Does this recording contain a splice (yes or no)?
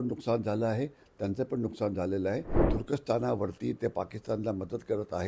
yes